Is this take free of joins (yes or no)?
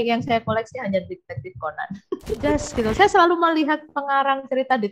no